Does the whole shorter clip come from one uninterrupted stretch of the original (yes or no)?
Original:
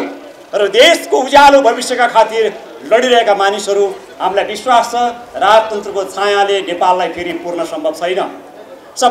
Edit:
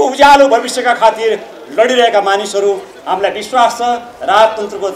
yes